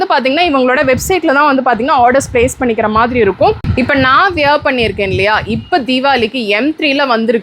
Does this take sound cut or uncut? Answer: cut